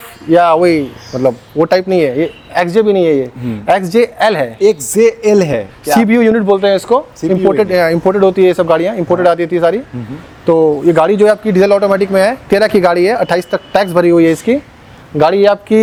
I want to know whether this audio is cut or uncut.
uncut